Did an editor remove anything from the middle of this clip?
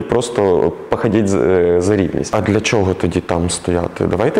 yes; 1 cut; at 2.3 s

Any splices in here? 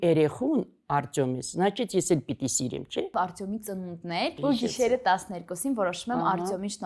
yes; 2 cuts; at 3.1 s, 4.4 s

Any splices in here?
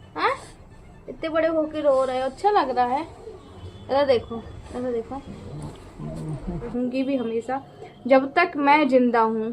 yes; 1 cut; at 6.6 s

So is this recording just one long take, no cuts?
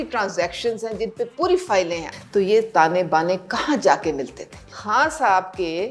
no; 2 cuts; at 2.0 s, 4.7 s

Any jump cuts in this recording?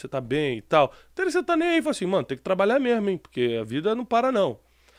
no; 0 cuts

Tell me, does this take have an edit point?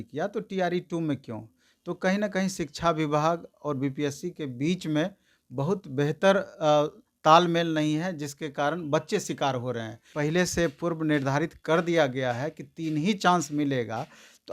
yes; 1 cut; at 10.1 s

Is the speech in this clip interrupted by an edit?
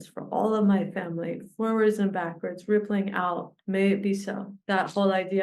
yes; 2 cuts; at 3.5 s, 4.5 s

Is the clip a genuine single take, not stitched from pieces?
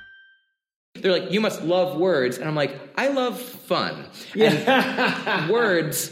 no; 1 cut; at 0.9 s

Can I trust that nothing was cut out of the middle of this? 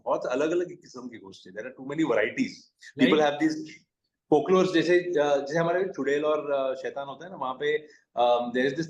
yes; 0 cuts

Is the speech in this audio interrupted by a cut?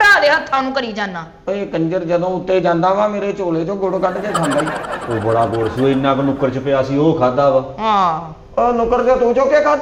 no; 0 cuts

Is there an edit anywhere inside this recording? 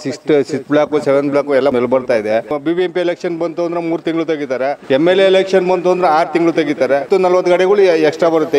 yes; 4 cuts; at 1.7 s, 2.5 s, 4.8 s, 7.1 s

